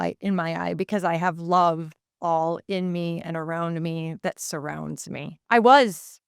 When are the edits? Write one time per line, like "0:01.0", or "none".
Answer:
0:05.4